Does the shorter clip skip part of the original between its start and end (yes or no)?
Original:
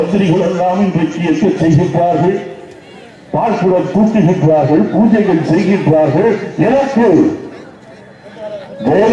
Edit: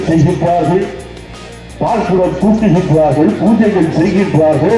no